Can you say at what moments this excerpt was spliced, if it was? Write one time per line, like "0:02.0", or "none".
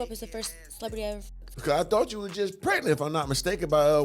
0:01.4